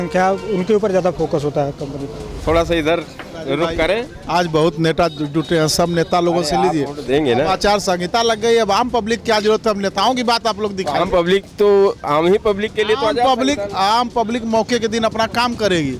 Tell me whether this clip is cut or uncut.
cut